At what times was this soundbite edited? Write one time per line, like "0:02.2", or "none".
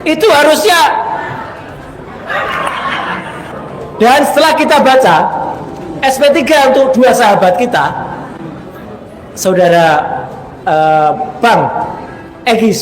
0:03.4